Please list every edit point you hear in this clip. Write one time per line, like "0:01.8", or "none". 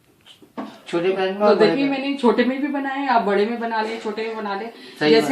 none